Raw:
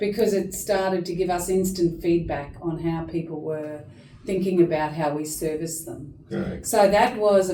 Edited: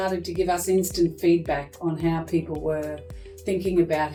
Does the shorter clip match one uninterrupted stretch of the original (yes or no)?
yes